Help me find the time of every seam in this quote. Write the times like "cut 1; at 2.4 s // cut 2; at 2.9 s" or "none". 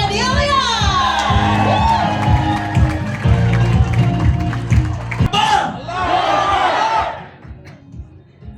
cut 1; at 5.3 s